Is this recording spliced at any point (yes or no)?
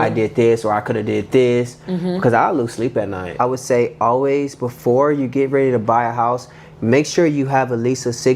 yes